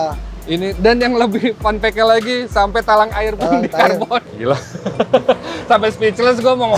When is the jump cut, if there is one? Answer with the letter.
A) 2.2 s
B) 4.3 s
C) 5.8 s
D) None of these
B